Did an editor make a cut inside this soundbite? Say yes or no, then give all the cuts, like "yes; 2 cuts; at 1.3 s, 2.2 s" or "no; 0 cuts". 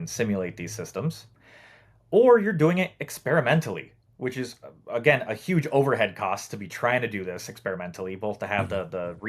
no; 0 cuts